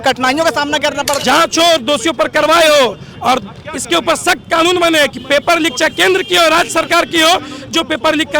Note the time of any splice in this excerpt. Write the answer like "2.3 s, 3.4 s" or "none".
1.2 s